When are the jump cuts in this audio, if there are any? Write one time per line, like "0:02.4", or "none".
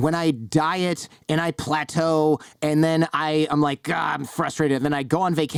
none